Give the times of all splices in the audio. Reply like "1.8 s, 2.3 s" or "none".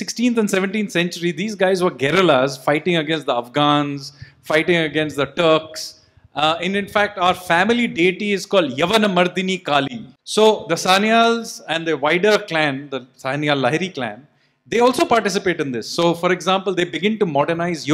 10.2 s